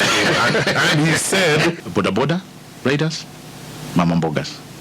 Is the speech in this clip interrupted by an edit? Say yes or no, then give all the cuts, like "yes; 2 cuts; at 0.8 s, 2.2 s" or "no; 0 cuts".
yes; 1 cut; at 1.8 s